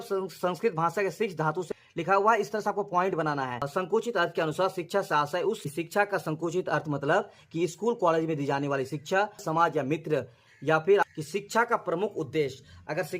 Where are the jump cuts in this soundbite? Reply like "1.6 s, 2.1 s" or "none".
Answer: 1.7 s, 3.7 s, 5.6 s, 9.4 s, 11.1 s